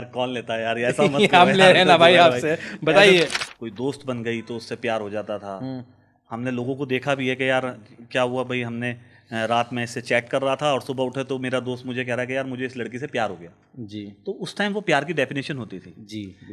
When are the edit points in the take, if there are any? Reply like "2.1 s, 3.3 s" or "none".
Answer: 3.4 s